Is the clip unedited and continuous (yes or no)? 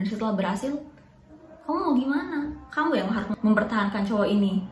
no